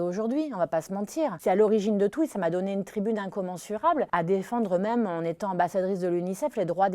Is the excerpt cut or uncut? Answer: cut